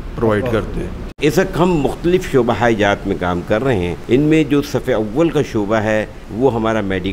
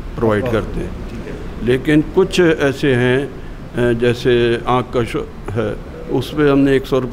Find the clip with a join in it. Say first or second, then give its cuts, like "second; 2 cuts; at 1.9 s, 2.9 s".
first; 3 cuts; at 1.0 s, 4.0 s, 6.2 s